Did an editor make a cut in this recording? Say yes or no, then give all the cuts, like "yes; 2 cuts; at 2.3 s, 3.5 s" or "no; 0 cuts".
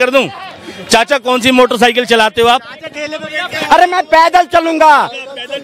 no; 0 cuts